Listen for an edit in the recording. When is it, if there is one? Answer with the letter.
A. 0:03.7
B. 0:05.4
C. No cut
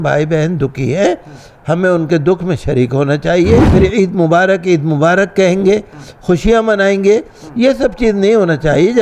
A